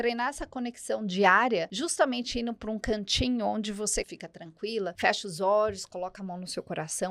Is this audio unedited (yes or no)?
no